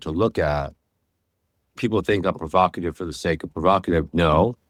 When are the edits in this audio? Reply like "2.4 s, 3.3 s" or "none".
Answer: none